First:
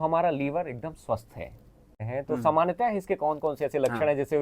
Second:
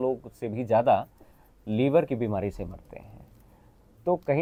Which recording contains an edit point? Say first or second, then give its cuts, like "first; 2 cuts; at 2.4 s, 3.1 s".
first; 1 cut; at 2.1 s